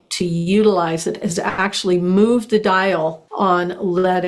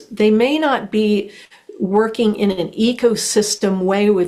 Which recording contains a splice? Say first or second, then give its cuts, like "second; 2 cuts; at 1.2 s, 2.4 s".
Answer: first; 1 cut; at 3.2 s